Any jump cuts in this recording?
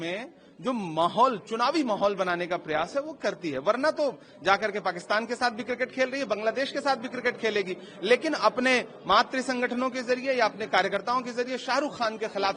no; 0 cuts

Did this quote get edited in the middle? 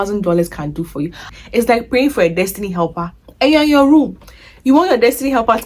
yes; 1 cut; at 1.3 s

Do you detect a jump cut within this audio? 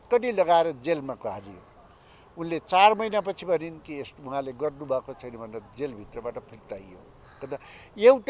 no; 0 cuts

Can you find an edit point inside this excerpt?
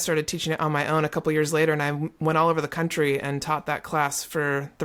no; 0 cuts

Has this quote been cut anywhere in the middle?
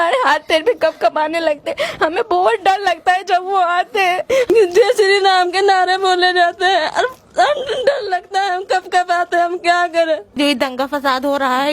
yes; 2 cuts; at 4.5 s, 10.4 s

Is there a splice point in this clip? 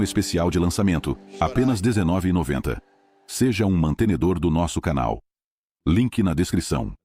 no; 0 cuts

